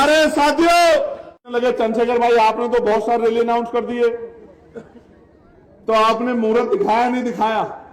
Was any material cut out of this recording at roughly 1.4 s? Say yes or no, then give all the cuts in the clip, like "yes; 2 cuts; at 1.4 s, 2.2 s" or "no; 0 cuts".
yes; 1 cut; at 1.4 s